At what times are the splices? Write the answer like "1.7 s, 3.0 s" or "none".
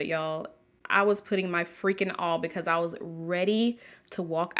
none